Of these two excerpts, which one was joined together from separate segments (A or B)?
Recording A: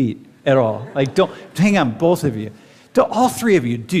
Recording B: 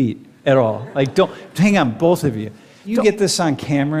B